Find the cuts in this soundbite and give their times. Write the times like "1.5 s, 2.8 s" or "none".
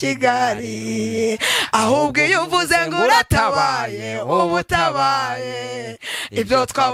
none